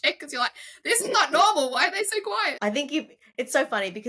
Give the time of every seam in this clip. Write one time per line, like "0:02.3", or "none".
0:02.6